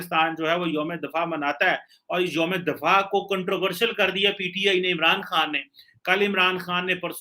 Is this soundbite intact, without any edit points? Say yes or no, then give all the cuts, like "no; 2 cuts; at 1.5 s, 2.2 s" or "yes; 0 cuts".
yes; 0 cuts